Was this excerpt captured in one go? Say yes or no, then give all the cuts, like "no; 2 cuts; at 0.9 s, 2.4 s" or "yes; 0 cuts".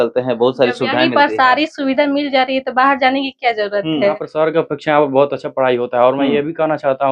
no; 1 cut; at 4.1 s